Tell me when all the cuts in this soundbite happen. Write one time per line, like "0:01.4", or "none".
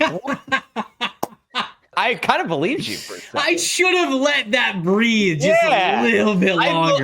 0:01.9